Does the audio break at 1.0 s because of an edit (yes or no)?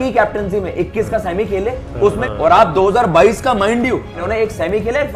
no